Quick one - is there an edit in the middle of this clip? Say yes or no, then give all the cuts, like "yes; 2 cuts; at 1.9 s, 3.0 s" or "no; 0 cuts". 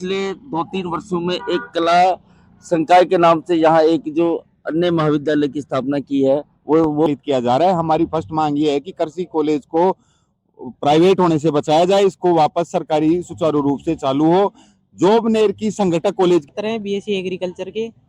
yes; 2 cuts; at 7.1 s, 16.5 s